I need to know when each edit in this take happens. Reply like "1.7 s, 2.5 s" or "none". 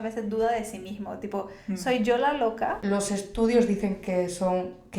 2.8 s